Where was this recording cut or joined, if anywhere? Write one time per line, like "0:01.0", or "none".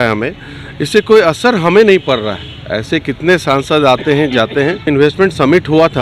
0:04.9